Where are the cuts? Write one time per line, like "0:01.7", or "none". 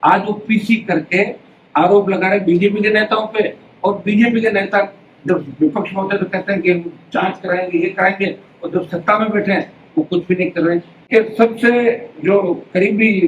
0:11.1